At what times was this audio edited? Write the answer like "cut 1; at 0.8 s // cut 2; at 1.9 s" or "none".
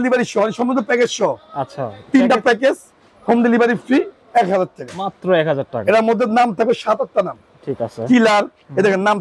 none